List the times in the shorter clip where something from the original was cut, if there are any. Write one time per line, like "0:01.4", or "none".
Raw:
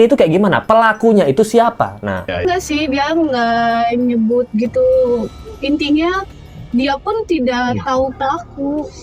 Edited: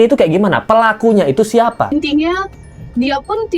0:01.9